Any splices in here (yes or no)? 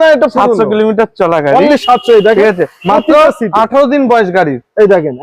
no